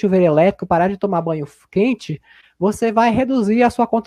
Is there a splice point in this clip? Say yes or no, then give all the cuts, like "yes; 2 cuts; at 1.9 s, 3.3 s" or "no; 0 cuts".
no; 0 cuts